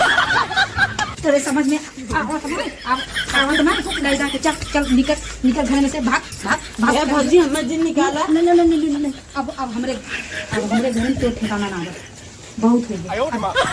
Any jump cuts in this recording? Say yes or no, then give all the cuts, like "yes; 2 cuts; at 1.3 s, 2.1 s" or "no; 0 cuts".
yes; 1 cut; at 1.1 s